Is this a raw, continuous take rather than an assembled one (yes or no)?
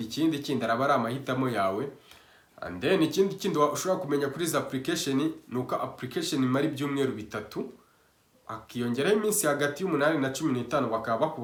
yes